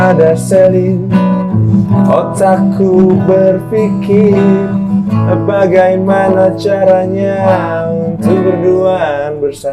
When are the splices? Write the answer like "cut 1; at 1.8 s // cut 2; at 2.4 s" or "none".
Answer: none